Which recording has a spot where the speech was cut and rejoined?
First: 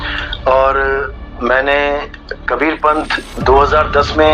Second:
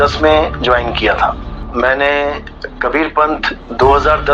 second; 1 cut; at 1.5 s

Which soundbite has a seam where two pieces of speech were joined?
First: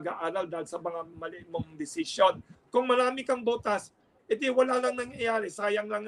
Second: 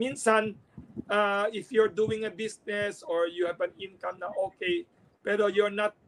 first; 1 cut; at 2.5 s

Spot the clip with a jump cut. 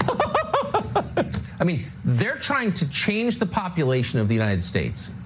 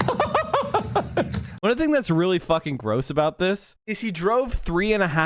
second; 1 cut; at 1.4 s

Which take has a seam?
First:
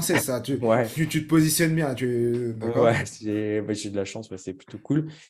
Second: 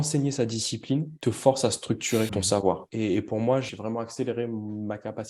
second; 3 cuts; at 1.1 s, 2.7 s, 3.7 s

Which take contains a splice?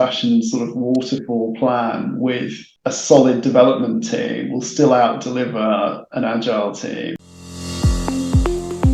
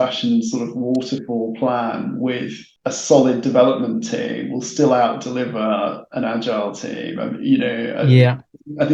first; 1 cut; at 7.1 s

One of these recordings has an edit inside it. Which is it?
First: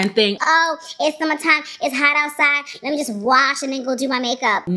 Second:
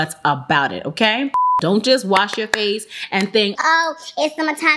second; 1 cut; at 1.3 s

